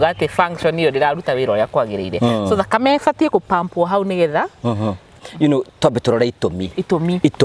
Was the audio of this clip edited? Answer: yes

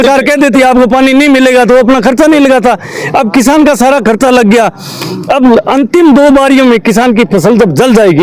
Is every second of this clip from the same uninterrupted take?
yes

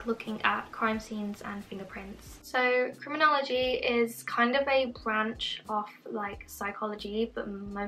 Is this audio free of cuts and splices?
yes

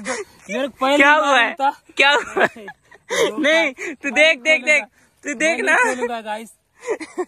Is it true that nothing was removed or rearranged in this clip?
yes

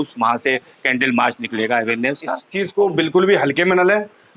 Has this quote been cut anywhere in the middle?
yes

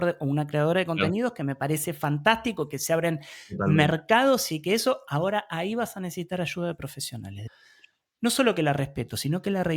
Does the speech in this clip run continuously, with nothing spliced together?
no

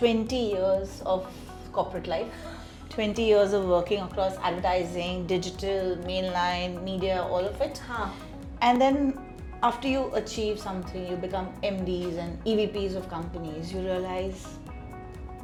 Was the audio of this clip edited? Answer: no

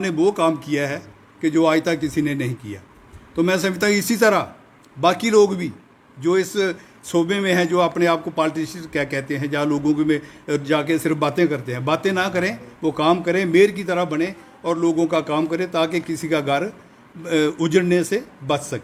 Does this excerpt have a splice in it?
no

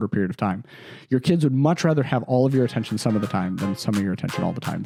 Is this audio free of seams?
yes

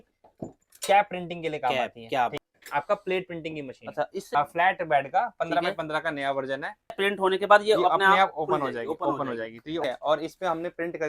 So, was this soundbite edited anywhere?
yes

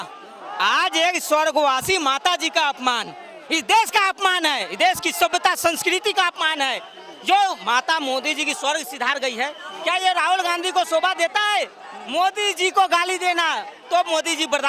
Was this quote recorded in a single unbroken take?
yes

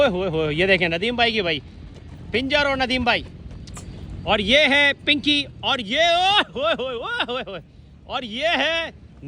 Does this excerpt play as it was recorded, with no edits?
yes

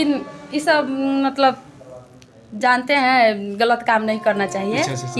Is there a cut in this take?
no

